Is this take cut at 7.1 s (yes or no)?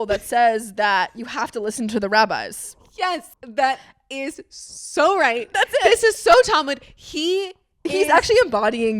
no